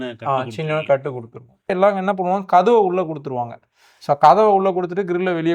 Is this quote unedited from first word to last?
no; 1 cut; at 1.5 s

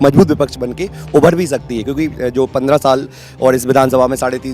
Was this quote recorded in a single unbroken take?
yes; 0 cuts

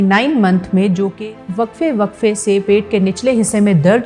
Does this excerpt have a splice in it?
yes; 1 cut; at 1.2 s

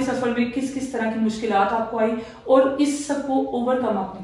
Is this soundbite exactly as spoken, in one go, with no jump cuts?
yes; 0 cuts

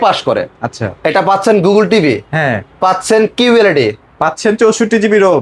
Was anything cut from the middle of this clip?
no; 0 cuts

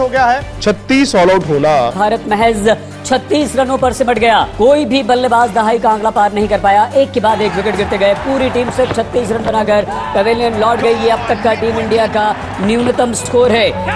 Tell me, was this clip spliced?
yes; 2 cuts; at 1.9 s, 4.5 s

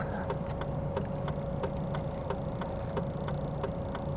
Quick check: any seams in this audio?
no; 0 cuts

